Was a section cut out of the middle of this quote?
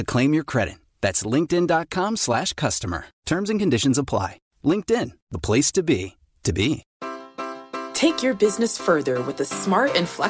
yes; 1 cut; at 6.9 s

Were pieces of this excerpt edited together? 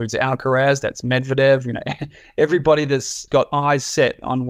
yes; 1 cut; at 3.2 s

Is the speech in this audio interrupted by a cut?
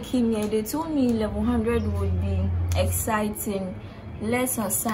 no; 0 cuts

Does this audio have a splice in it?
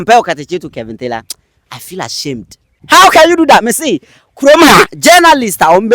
yes; 1 cut; at 2.8 s

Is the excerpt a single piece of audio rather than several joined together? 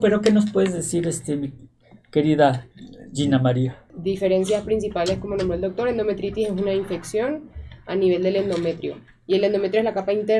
no; 1 cut; at 3.8 s

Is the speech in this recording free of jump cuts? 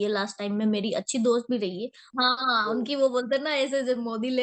no; 1 cut; at 2.1 s

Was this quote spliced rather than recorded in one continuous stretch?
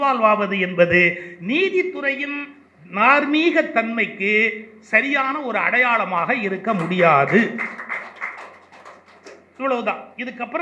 no; 0 cuts

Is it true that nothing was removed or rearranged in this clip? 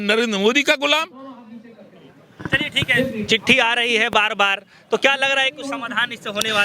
yes; 0 cuts

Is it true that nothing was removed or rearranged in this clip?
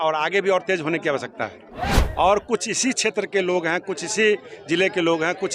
no; 1 cut; at 2.0 s

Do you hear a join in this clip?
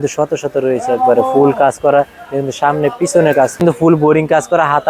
yes; 1 cut; at 3.6 s

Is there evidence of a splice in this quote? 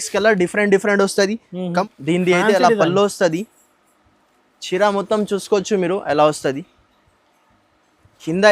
yes; 1 cut; at 1.8 s

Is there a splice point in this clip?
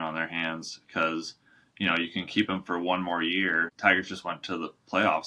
yes; 1 cut; at 3.7 s

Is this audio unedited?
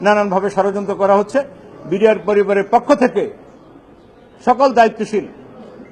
yes; 0 cuts

